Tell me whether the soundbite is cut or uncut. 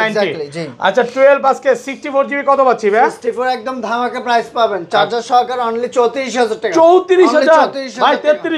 uncut